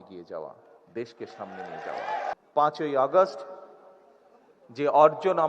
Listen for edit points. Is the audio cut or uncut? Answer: cut